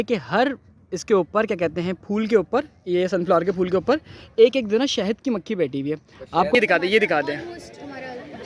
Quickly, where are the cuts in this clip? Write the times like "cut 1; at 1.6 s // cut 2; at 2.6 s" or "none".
cut 1; at 6.5 s